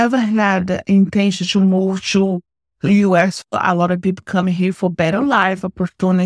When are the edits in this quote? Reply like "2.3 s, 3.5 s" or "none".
3.4 s